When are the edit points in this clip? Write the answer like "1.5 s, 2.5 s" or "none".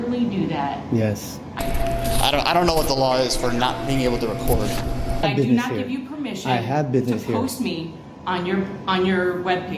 1.6 s, 5.2 s

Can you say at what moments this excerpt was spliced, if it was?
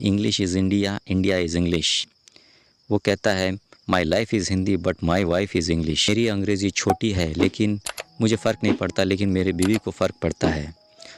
none

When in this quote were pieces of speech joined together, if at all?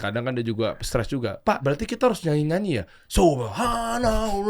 1.6 s

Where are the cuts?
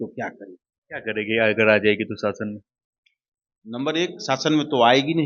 none

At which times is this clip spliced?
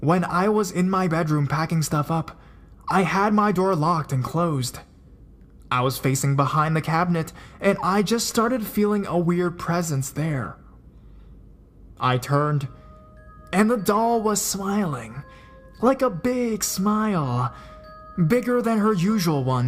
6.7 s

